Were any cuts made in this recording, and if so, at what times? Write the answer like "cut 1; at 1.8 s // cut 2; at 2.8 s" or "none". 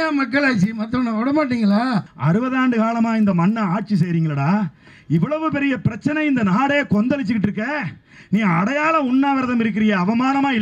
cut 1; at 2.1 s